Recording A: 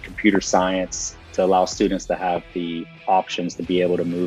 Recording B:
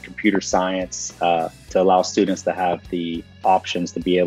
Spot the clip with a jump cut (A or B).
A